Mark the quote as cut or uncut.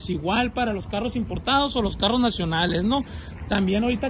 uncut